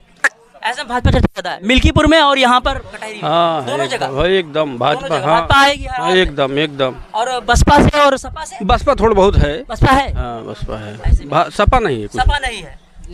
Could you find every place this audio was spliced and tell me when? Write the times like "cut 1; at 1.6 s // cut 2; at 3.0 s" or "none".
none